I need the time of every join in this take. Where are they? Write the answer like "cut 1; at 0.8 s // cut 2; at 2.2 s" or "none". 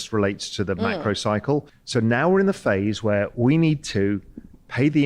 cut 1; at 1.8 s